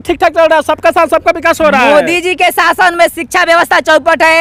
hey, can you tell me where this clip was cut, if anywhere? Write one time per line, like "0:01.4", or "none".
none